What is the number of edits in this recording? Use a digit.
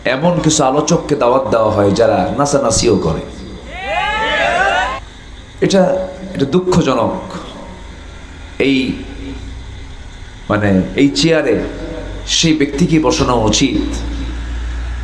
1